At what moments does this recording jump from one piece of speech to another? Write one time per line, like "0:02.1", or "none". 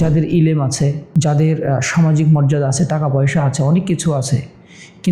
0:01.0